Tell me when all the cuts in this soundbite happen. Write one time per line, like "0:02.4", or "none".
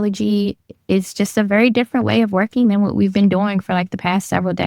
none